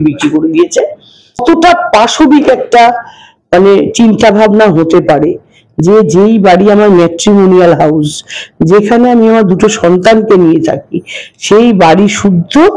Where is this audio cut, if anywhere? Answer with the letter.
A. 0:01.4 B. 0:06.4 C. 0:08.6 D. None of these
A